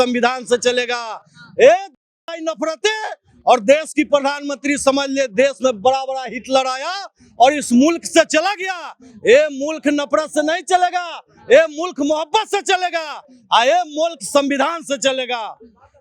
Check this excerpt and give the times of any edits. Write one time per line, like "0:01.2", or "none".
none